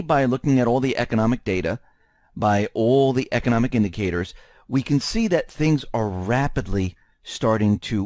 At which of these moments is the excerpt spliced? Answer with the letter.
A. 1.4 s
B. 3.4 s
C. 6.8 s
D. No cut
A